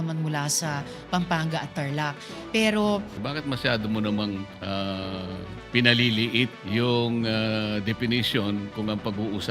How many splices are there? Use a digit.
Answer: 4